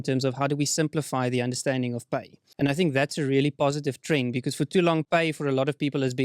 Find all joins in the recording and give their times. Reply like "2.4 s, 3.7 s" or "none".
2.4 s